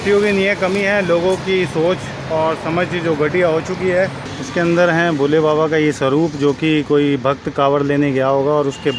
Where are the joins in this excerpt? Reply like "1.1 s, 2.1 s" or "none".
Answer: 4.3 s